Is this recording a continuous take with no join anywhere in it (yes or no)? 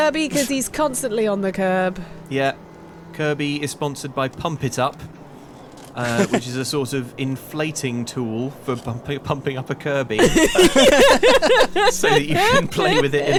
yes